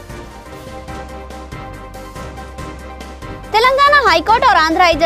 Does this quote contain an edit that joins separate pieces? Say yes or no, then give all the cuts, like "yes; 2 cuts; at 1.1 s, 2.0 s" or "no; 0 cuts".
no; 0 cuts